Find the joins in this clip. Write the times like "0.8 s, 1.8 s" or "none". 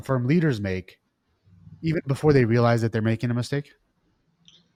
none